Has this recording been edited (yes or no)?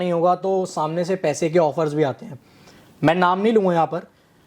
no